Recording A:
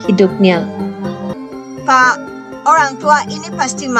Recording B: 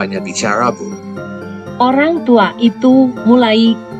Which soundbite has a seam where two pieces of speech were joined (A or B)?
A